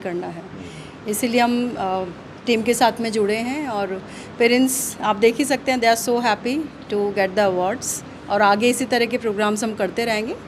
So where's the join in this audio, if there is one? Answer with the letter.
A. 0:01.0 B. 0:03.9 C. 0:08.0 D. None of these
D